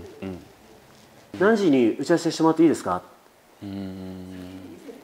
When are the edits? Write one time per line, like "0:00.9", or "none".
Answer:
0:01.2